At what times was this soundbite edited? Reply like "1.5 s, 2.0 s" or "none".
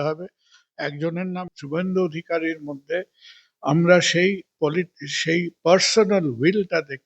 1.5 s